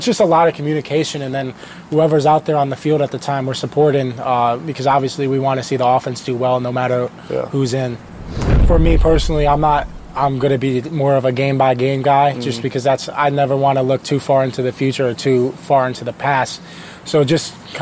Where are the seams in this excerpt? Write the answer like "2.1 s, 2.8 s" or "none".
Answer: 8.6 s